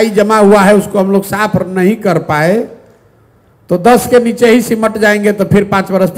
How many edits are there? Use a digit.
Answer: 0